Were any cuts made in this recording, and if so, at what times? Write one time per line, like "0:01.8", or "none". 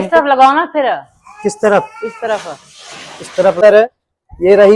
0:03.6